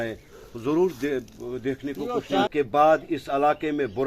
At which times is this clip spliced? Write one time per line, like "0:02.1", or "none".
0:02.5